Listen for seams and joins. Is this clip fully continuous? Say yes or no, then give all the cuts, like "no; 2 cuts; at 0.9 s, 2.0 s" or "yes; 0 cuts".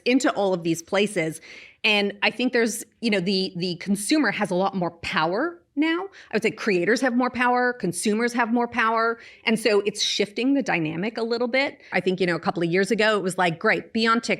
no; 1 cut; at 11.9 s